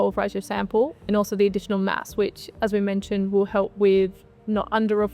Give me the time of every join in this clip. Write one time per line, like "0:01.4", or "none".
0:01.1